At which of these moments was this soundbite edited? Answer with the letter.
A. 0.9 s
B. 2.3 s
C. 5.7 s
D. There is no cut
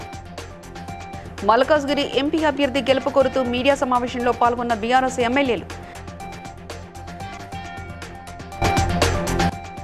A